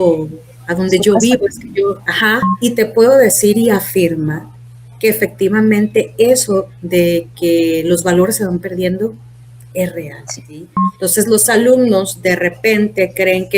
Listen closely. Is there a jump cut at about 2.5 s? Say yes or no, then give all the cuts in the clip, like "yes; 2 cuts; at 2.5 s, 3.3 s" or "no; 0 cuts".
yes; 2 cuts; at 2.5 s, 10.8 s